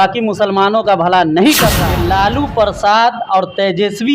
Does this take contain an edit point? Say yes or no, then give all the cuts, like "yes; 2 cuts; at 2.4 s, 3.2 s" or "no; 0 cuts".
yes; 1 cut; at 1.8 s